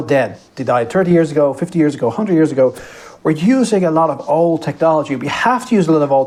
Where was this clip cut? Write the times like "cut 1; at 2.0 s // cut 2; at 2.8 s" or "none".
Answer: none